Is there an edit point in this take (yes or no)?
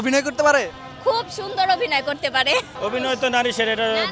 yes